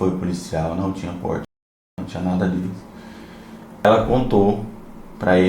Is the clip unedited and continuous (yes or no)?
no